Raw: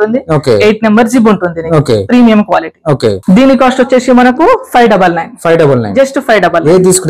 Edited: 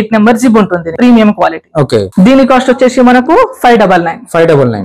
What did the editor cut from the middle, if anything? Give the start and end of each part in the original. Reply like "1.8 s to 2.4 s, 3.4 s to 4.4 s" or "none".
1.6 s to 2.0 s

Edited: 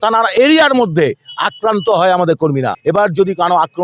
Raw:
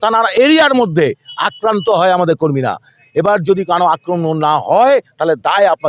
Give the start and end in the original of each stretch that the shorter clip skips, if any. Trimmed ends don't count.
2.7 s to 3.0 s

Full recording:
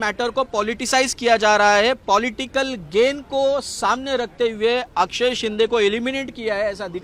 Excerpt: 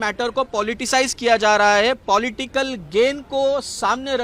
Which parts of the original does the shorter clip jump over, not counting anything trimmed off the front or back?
none

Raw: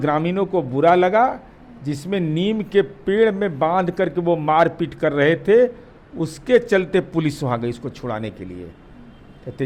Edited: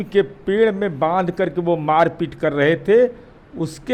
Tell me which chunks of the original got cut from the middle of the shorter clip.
none

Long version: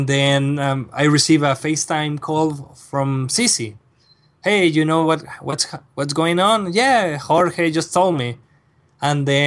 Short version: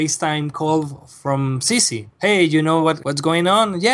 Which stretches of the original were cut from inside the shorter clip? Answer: 3.7 s to 4.2 s, 5.3 s to 6.0 s

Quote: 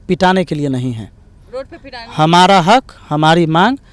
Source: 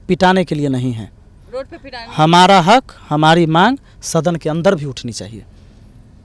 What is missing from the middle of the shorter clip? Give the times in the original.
none

